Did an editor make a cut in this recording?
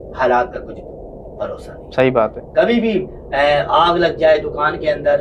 no; 0 cuts

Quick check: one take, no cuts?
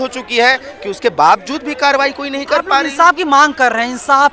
yes; 0 cuts

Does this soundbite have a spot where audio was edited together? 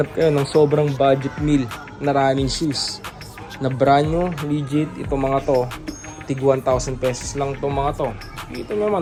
no; 0 cuts

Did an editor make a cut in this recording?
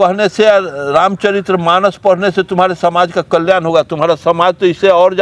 no; 0 cuts

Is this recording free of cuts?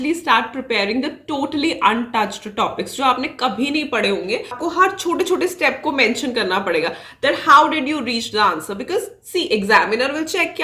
no; 1 cut; at 4.6 s

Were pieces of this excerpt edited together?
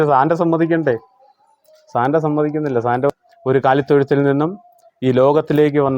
yes; 1 cut; at 3.1 s

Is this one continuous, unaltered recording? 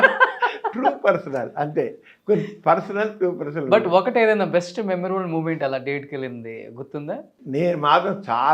yes; 0 cuts

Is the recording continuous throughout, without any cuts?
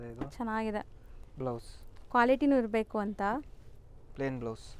yes; 0 cuts

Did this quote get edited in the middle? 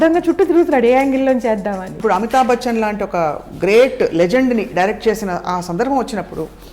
yes; 1 cut; at 1.9 s

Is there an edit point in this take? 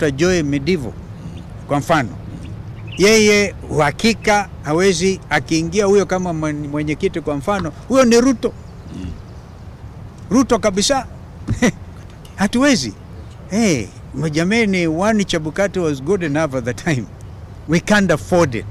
no; 0 cuts

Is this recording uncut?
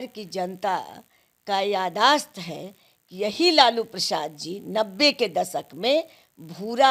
yes; 0 cuts

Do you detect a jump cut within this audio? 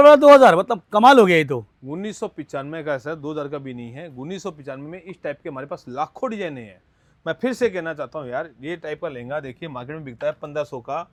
no; 0 cuts

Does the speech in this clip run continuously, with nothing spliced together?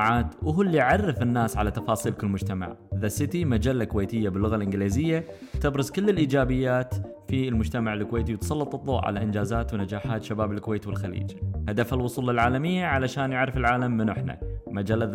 yes; 0 cuts

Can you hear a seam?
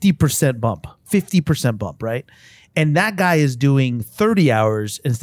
yes; 1 cut; at 0.9 s

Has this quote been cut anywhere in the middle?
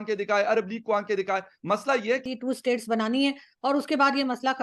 yes; 1 cut; at 2.3 s

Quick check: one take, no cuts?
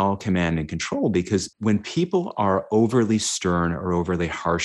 no; 1 cut; at 1.5 s

